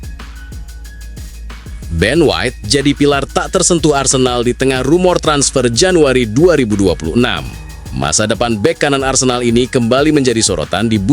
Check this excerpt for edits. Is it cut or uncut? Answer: cut